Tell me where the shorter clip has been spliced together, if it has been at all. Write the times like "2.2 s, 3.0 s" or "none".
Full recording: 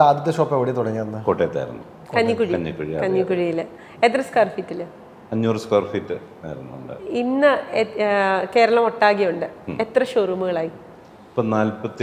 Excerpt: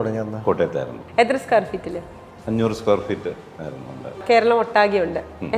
1.0 s, 4.2 s